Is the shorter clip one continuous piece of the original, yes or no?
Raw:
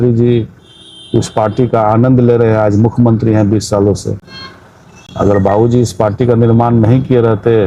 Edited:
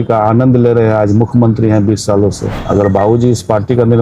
no